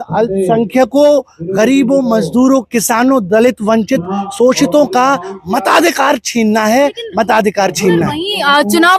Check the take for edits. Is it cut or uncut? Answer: uncut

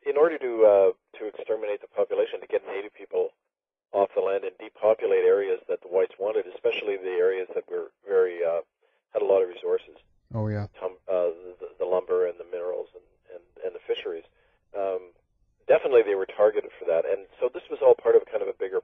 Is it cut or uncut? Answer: cut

